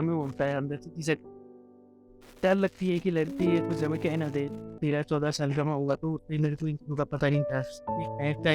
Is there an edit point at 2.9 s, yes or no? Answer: no